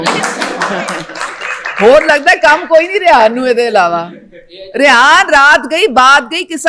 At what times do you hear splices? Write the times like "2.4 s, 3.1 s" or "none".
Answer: none